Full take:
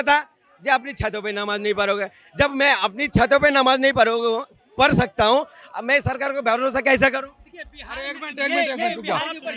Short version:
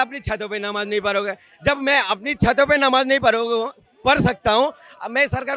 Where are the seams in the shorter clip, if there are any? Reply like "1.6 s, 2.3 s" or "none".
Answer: none